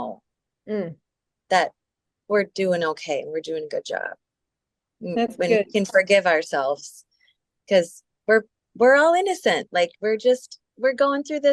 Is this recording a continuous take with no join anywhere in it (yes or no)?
no